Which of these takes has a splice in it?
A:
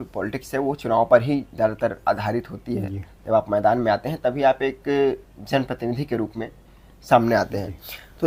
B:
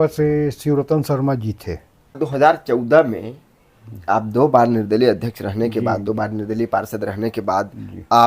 B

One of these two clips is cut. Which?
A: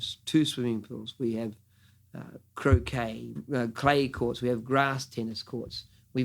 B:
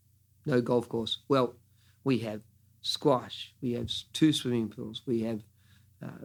A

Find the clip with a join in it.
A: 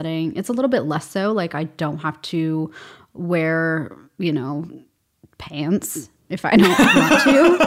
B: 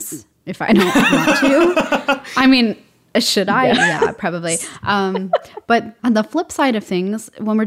B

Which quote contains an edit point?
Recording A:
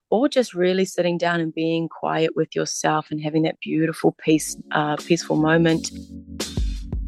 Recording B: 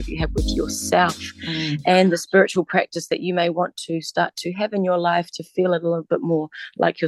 A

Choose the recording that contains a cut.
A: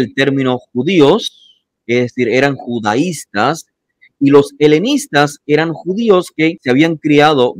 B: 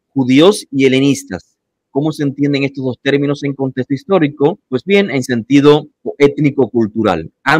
A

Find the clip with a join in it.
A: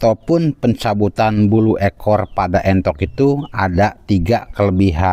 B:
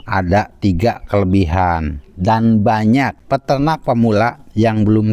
B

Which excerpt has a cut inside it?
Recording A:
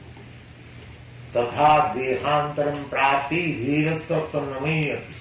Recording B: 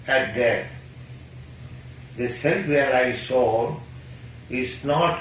B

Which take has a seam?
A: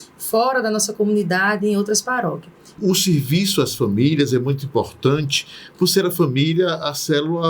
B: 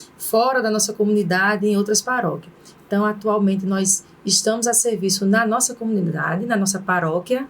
A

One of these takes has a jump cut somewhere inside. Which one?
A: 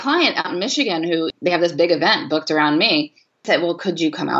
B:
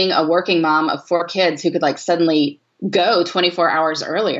A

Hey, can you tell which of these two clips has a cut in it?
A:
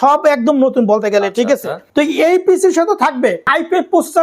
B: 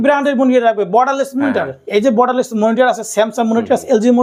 A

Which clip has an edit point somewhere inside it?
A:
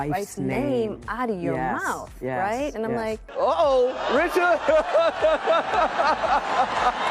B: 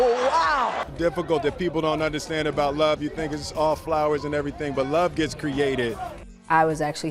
B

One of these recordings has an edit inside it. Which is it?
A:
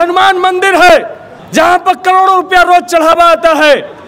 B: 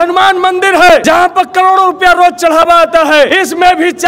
B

